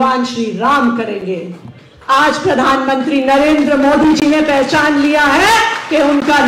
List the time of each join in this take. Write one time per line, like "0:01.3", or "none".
none